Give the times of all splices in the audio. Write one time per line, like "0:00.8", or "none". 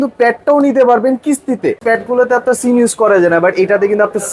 0:01.8